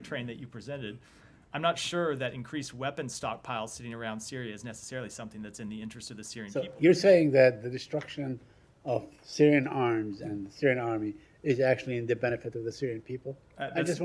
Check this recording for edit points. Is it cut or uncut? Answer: cut